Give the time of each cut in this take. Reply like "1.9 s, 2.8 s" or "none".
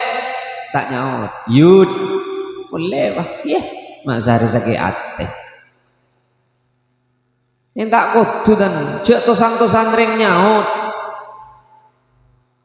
none

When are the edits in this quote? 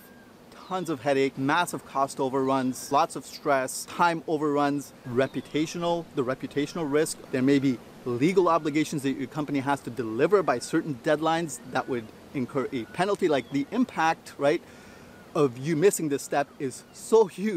1.4 s, 2.8 s, 3.9 s, 5.0 s, 7.2 s

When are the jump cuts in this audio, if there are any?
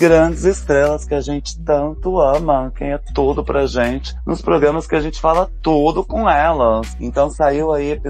none

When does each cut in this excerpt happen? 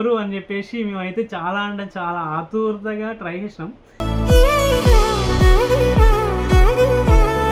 none

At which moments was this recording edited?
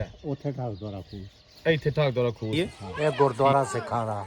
2.5 s

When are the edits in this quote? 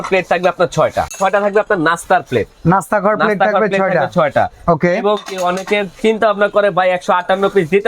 1.1 s

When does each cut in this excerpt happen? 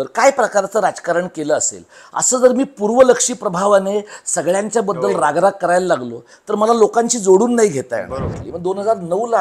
8.4 s

